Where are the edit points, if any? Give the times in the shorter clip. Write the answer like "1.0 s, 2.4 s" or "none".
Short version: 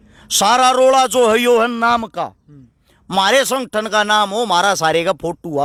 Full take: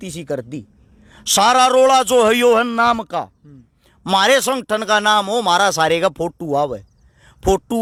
none